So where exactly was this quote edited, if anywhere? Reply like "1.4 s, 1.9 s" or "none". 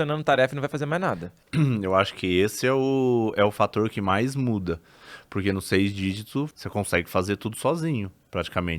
1.3 s, 6.5 s